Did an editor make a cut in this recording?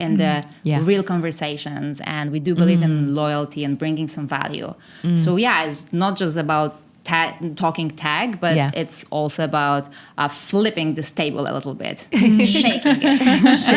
no; 0 cuts

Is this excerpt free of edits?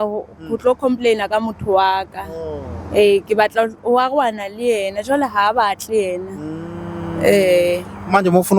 yes; 0 cuts

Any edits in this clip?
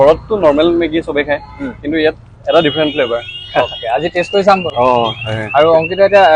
no; 0 cuts

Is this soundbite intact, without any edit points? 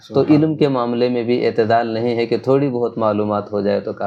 yes; 0 cuts

